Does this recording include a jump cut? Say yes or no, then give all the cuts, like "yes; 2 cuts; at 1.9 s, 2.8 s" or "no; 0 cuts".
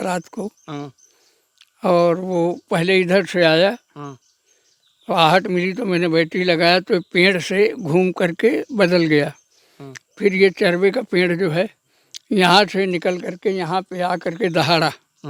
no; 0 cuts